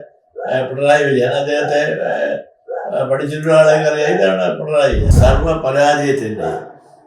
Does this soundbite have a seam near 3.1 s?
no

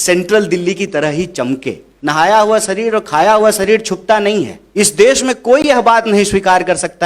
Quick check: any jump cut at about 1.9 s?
yes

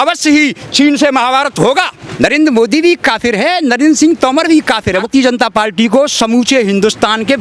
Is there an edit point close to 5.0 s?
yes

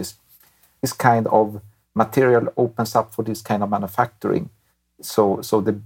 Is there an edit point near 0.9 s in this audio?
yes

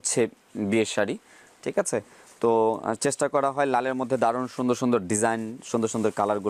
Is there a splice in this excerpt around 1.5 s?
no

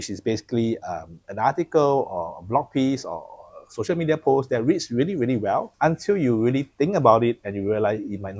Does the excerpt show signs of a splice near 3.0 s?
no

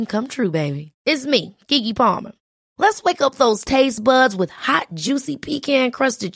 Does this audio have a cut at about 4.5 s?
no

